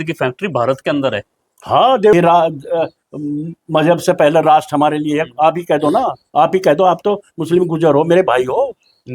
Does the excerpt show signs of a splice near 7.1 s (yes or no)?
no